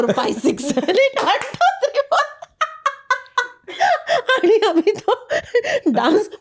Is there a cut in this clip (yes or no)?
no